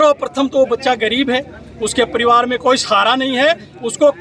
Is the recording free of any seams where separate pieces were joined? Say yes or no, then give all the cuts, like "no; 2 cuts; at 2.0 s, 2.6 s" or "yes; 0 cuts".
yes; 0 cuts